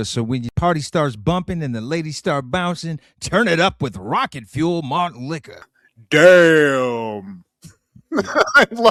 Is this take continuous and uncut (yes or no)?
yes